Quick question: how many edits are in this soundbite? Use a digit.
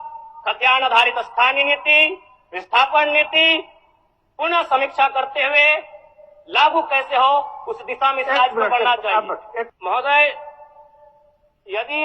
1